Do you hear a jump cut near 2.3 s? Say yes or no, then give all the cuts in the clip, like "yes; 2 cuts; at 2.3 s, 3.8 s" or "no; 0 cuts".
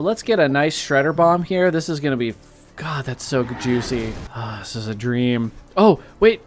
no; 1 cut; at 4.2 s